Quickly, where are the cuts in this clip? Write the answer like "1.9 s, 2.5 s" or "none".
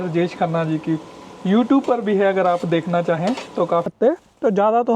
3.9 s